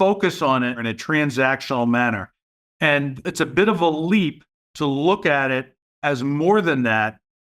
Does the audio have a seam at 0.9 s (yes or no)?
yes